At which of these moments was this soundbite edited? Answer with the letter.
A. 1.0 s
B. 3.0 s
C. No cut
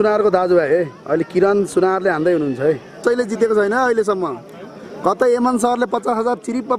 B